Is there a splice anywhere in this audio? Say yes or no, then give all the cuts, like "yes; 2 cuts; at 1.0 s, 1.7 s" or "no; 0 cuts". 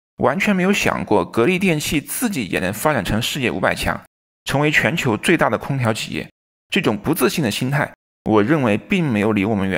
yes; 1 cut; at 6.5 s